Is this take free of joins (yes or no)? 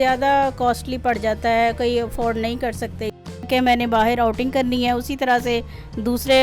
no